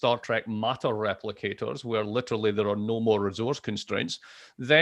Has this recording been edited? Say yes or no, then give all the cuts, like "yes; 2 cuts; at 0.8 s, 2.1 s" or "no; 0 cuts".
no; 0 cuts